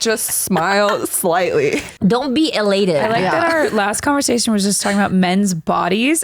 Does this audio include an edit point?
yes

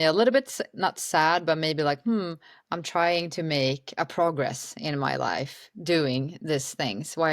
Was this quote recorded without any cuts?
yes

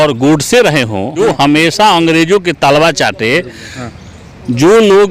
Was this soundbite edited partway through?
yes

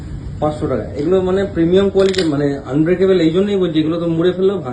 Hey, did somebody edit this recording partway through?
no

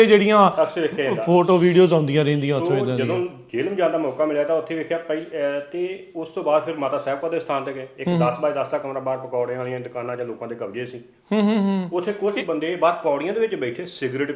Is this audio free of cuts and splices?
yes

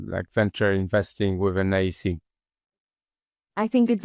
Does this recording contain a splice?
no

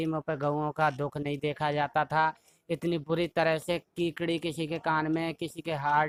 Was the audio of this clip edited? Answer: no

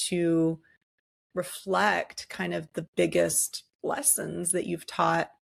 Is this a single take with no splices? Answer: yes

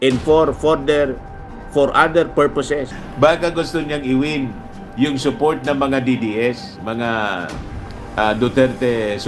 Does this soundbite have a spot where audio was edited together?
yes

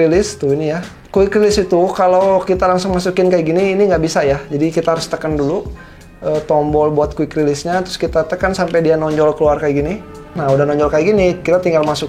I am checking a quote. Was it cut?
no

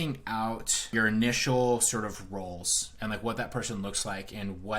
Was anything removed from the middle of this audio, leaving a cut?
yes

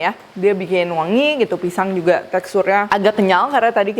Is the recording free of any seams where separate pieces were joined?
no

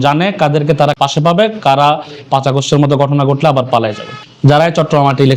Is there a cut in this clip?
yes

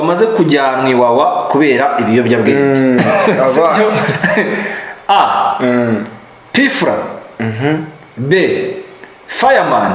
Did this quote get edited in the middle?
no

